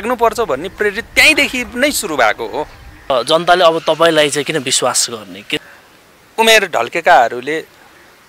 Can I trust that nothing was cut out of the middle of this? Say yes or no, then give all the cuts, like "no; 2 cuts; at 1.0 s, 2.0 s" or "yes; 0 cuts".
no; 2 cuts; at 2.9 s, 5.6 s